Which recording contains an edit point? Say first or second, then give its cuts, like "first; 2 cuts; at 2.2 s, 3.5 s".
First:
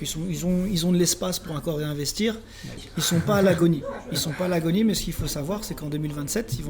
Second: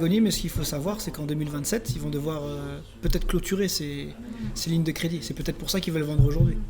first; 1 cut; at 2.8 s